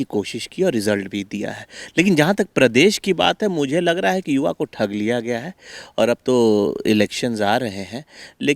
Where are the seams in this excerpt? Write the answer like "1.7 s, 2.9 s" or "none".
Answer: none